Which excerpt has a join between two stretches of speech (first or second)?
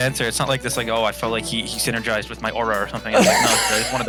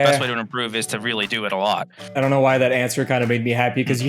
second